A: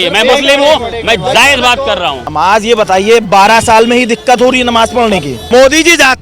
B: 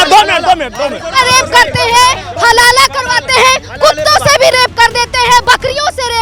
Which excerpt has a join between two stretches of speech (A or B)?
A